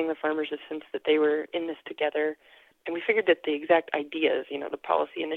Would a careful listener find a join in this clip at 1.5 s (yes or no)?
no